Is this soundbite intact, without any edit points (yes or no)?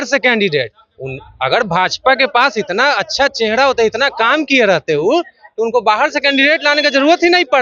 yes